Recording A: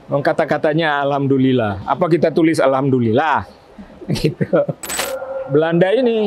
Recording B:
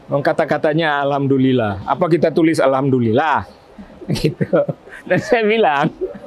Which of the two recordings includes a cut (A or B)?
A